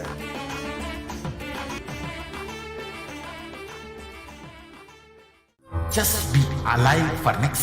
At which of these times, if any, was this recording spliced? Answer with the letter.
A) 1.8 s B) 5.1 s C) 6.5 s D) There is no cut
A